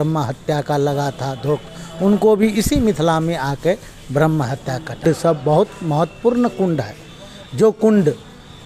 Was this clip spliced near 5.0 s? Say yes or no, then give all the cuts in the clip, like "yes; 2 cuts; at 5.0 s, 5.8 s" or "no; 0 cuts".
yes; 1 cut; at 5.0 s